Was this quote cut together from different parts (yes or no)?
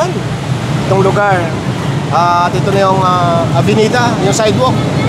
no